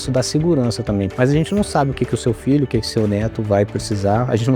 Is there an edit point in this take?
yes; 1 cut; at 1.1 s

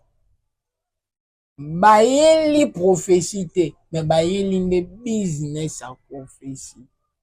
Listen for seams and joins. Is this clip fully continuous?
yes; 0 cuts

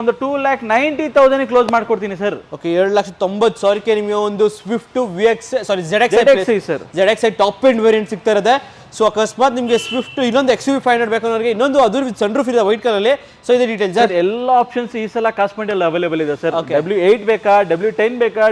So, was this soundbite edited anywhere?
no; 0 cuts

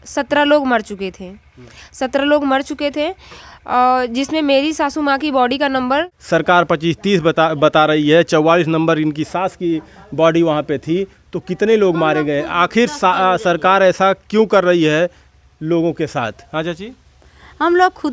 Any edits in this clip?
yes; 1 cut; at 6.2 s

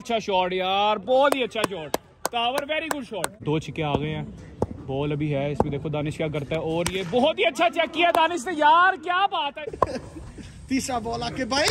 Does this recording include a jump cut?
yes; 2 cuts; at 3.4 s, 9.7 s

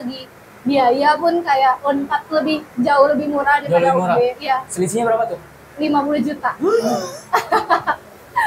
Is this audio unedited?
yes; 0 cuts

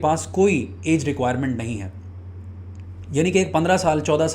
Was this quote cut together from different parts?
no; 0 cuts

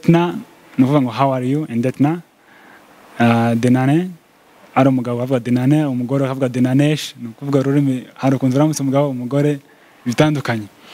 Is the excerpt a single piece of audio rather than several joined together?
yes; 0 cuts

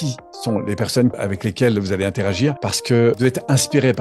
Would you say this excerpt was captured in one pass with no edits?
no; 2 cuts; at 1.2 s, 3.2 s

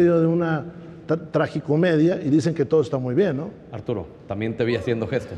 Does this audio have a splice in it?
no; 0 cuts

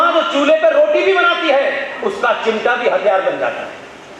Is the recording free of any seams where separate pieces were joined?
yes; 0 cuts

